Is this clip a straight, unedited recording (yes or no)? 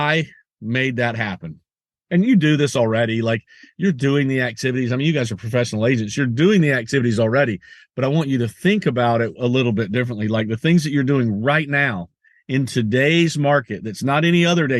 no